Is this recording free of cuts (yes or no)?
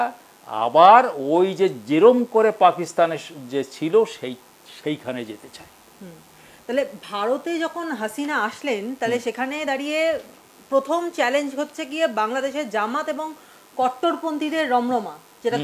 yes